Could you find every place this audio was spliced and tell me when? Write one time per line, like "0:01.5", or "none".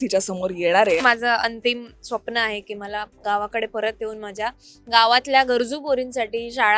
0:01.0

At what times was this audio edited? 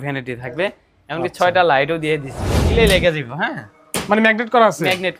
0:02.7

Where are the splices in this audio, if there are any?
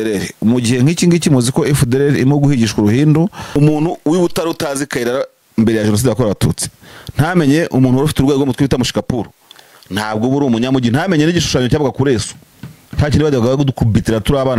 0:03.5

